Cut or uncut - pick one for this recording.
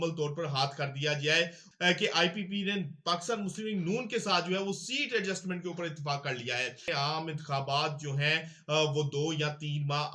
cut